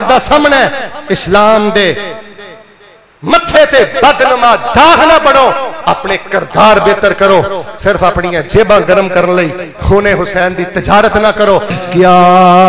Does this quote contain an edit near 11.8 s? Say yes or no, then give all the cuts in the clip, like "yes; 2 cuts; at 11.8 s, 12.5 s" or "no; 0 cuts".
yes; 1 cut; at 11.8 s